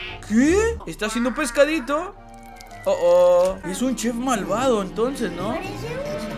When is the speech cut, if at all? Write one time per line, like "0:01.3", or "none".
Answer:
0:00.9
0:03.7